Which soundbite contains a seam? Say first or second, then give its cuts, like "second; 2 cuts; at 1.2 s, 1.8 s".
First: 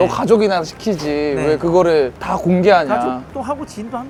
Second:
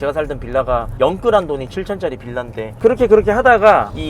second; 1 cut; at 2.6 s